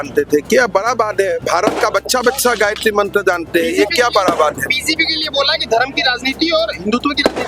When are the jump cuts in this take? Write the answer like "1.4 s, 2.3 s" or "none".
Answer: none